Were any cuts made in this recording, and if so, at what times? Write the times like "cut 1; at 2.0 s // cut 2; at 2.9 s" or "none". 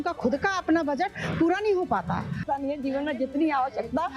cut 1; at 2.4 s